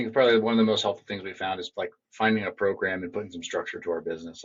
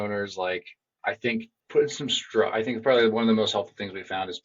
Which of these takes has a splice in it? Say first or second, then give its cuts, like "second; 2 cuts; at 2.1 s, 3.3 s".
second; 1 cut; at 1.6 s